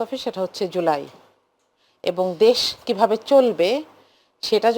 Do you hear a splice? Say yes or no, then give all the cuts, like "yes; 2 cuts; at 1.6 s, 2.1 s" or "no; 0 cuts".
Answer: no; 0 cuts